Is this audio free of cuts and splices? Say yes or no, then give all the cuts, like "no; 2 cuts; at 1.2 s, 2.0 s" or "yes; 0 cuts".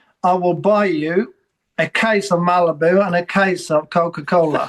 yes; 0 cuts